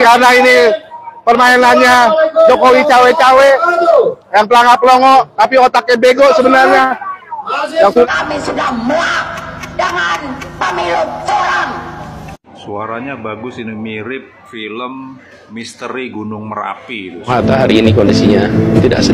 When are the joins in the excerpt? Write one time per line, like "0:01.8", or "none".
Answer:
0:08.0
0:17.3